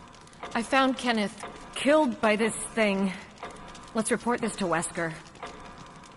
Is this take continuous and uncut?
no; 1 cut; at 5.3 s

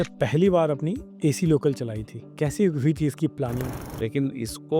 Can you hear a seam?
yes; 1 cut; at 3.6 s

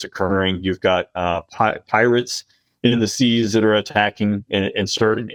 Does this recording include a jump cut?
no; 0 cuts

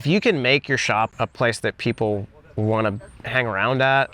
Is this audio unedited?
no; 2 cuts; at 1.1 s, 3.1 s

